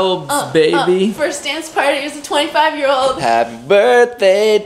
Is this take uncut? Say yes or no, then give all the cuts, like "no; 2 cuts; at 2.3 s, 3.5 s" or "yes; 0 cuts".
no; 1 cut; at 3.2 s